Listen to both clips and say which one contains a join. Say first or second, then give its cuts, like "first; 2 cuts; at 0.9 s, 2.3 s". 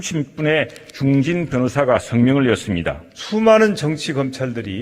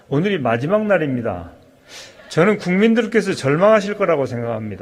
first; 1 cut; at 3.1 s